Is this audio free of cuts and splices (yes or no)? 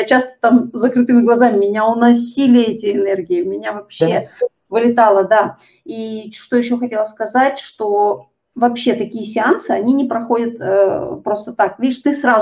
yes